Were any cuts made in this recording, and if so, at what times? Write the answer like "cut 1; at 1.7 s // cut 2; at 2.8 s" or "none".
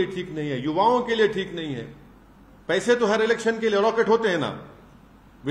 none

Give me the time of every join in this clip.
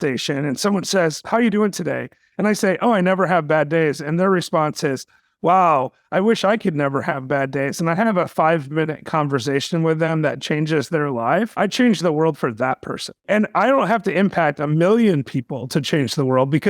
cut 1; at 1.2 s // cut 2; at 11.5 s // cut 3; at 13.1 s

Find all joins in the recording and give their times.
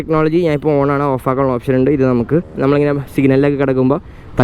cut 1; at 2.4 s

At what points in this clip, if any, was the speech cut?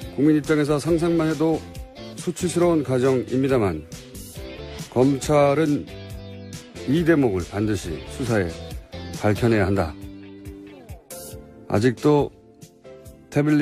cut 1; at 5.4 s

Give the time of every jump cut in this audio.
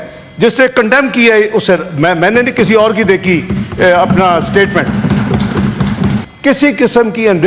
cut 1; at 6.3 s

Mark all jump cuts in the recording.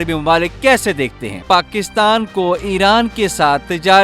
cut 1; at 1.3 s

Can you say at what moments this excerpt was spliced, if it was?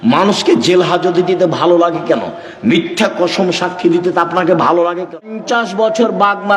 cut 1; at 5.4 s

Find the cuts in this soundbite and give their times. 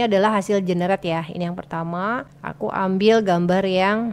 none

